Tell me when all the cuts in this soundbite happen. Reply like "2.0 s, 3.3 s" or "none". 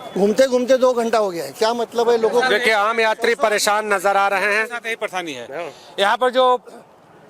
none